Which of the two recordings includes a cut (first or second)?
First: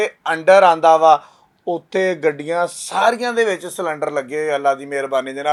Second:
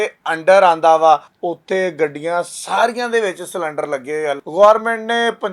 second